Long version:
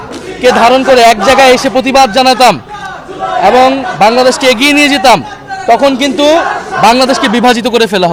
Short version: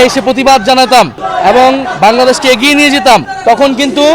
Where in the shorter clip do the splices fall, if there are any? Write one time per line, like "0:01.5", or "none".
0:01.2
0:03.3